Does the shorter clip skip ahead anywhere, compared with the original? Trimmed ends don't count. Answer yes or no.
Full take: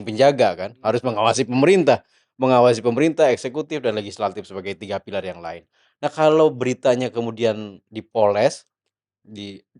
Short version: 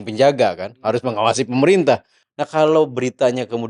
yes